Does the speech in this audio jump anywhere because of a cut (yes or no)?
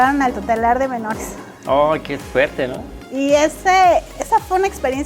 no